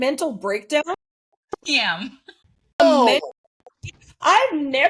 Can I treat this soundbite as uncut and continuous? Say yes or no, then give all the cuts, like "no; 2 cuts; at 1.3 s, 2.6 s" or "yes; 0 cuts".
no; 1 cut; at 2.8 s